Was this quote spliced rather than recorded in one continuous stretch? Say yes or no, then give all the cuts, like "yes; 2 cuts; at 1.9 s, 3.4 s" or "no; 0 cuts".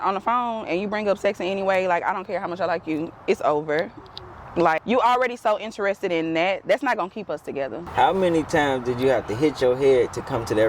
yes; 2 cuts; at 4.8 s, 7.8 s